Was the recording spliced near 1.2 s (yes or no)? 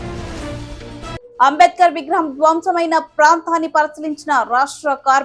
no